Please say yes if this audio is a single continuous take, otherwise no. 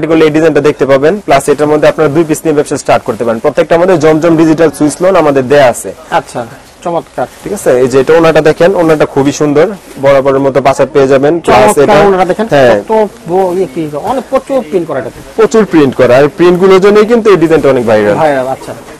yes